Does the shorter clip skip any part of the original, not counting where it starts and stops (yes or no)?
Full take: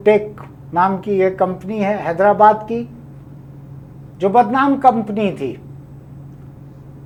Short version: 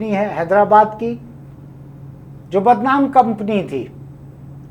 no